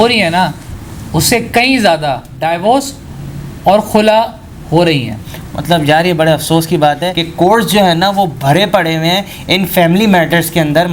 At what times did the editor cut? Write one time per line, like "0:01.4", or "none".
none